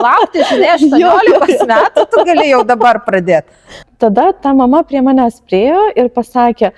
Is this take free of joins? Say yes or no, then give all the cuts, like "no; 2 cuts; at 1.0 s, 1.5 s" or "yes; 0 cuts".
no; 1 cut; at 3.8 s